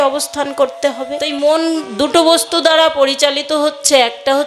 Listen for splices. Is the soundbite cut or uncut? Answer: cut